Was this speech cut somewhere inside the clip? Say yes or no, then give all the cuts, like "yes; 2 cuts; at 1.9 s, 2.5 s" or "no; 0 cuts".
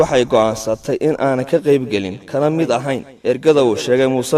yes; 1 cut; at 3.1 s